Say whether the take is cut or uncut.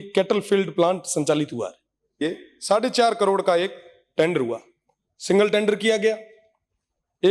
cut